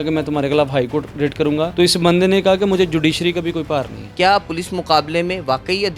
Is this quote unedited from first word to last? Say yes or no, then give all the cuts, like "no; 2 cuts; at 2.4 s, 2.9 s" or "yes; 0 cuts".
no; 2 cuts; at 1.7 s, 4.0 s